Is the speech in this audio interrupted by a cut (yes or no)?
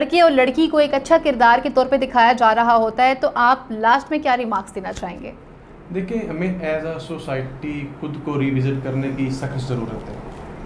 no